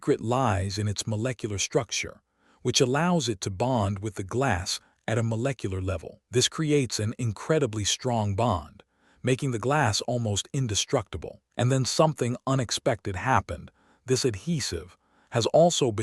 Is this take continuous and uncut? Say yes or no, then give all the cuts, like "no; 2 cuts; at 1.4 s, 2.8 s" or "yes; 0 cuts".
yes; 0 cuts